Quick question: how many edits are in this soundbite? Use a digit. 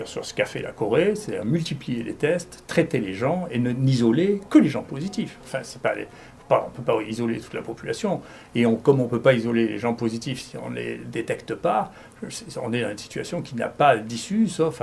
0